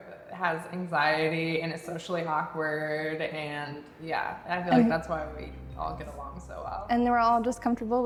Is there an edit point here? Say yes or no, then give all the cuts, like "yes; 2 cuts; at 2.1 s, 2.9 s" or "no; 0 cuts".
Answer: no; 0 cuts